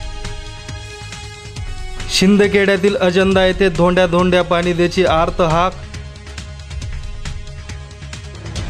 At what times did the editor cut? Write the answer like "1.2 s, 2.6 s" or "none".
none